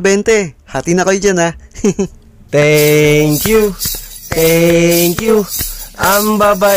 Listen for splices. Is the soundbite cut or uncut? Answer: uncut